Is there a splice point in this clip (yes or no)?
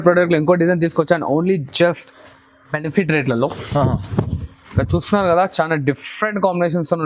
no